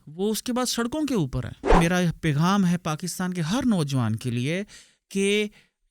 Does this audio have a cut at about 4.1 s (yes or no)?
no